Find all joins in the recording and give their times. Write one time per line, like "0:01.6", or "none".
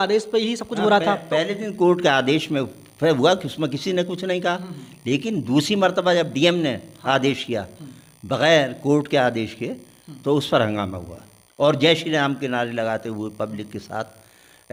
none